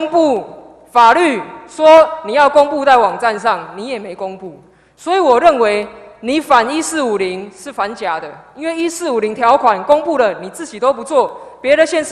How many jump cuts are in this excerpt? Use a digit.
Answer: 0